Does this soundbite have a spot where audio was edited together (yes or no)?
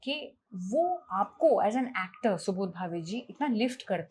no